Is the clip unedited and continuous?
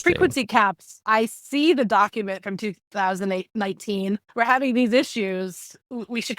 no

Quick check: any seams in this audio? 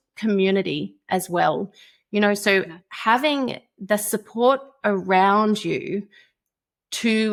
no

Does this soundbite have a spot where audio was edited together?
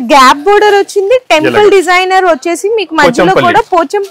no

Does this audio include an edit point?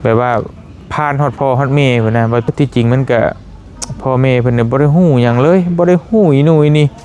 yes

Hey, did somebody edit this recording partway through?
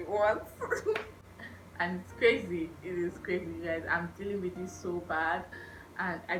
no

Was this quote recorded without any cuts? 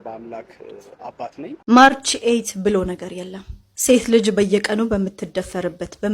no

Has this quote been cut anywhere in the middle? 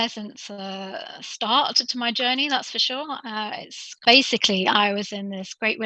yes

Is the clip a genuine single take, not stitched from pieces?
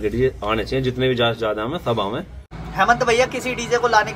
no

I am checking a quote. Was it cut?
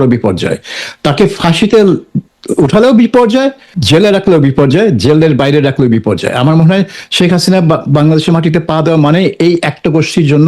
yes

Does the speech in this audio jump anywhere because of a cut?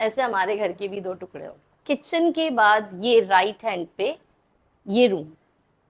yes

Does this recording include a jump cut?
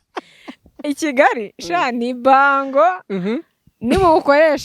no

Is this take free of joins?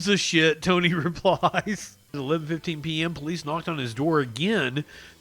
no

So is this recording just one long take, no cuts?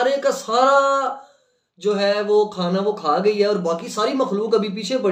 yes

